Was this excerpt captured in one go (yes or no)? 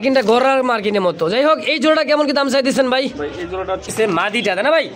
no